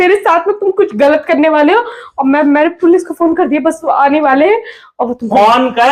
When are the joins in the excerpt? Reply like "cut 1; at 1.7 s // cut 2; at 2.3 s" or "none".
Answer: none